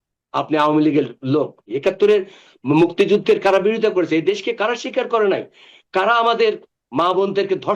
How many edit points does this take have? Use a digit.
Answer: 1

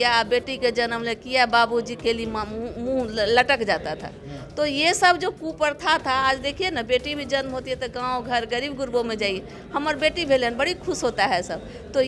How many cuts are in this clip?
0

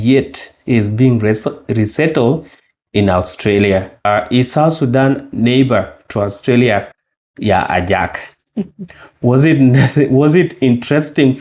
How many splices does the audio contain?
1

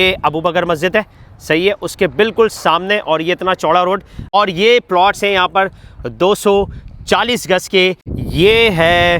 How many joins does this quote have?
2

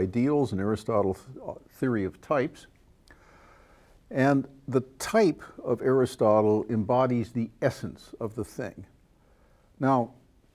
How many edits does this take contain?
1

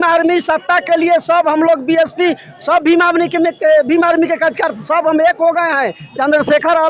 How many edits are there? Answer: 0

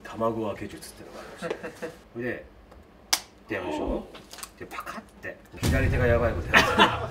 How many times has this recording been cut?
2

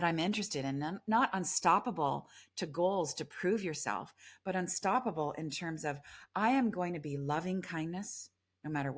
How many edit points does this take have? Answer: 0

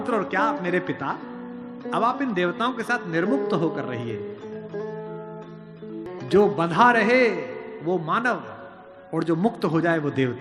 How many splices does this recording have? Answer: 0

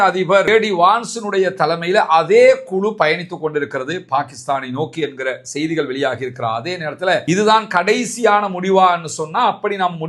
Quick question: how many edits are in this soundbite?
1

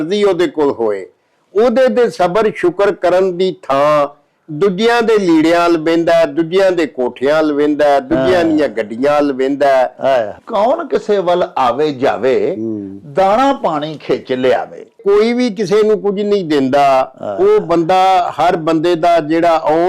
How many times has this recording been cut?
2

